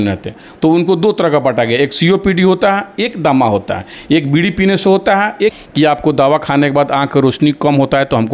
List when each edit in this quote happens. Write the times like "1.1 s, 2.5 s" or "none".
5.6 s